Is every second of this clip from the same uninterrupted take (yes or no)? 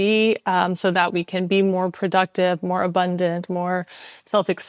yes